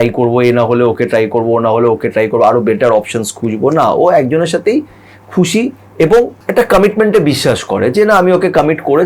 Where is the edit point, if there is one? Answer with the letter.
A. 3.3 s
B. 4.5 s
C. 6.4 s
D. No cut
C